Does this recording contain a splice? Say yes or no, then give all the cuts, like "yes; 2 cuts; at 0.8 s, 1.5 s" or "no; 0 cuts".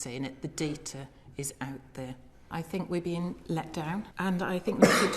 yes; 2 cuts; at 2.5 s, 4.1 s